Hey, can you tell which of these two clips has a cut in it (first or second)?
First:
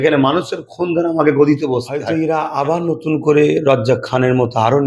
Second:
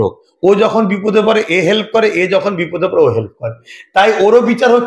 first